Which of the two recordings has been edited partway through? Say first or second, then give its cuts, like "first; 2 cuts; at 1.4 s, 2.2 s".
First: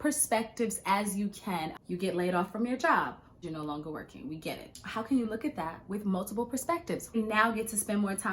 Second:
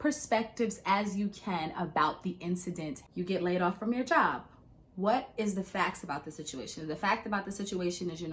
first; 4 cuts; at 1.7 s, 3.4 s, 5.0 s, 7.1 s